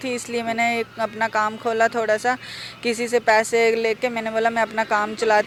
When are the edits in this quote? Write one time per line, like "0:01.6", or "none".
none